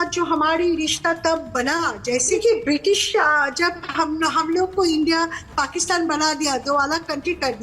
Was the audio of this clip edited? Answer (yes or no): yes